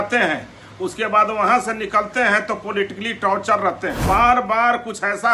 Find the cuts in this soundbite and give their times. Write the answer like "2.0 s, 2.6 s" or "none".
4.0 s